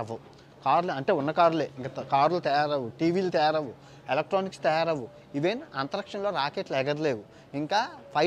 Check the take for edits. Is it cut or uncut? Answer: uncut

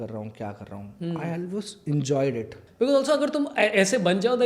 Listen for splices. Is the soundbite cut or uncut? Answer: cut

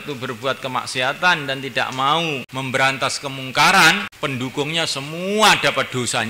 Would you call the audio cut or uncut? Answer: cut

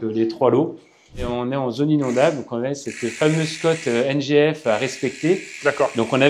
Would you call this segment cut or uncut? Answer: cut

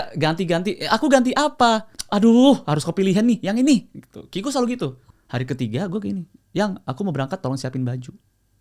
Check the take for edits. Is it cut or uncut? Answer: cut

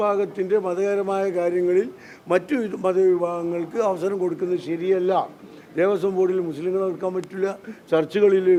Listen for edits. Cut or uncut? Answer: uncut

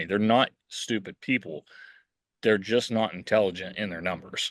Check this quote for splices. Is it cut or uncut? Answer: uncut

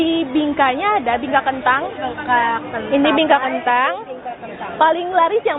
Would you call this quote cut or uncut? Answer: uncut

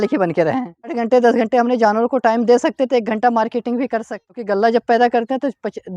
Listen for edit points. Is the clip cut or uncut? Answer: cut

